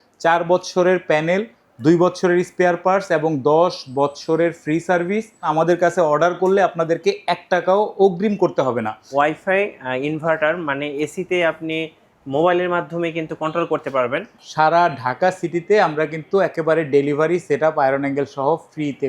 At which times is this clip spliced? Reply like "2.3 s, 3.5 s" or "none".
5.5 s, 9.1 s, 14.4 s

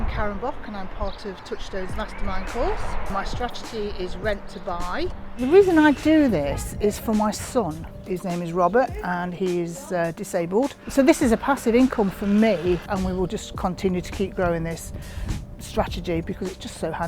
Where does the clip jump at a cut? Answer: 5.2 s, 10.8 s, 12.9 s

